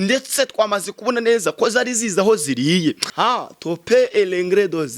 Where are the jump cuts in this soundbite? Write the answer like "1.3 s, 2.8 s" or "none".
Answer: 3.1 s

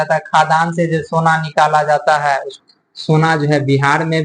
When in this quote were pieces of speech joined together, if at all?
2.5 s

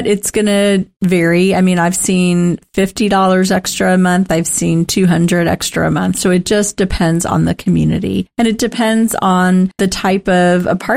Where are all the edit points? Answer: 0.9 s, 9.8 s

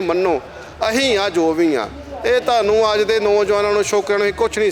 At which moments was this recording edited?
none

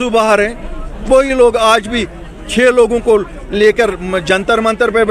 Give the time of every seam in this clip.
none

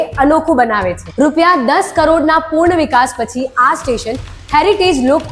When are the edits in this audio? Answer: 1.0 s

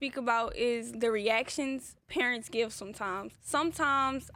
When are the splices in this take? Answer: 0.9 s, 3.3 s

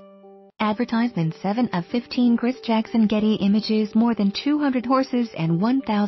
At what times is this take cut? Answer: none

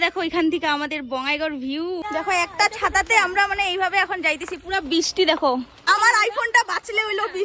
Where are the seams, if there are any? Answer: 2.1 s, 5.8 s

